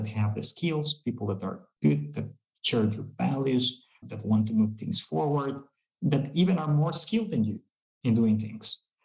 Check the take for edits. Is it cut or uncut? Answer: cut